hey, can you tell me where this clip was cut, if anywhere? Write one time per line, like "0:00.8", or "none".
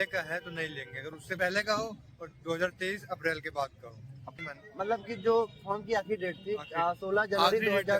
0:01.3
0:04.4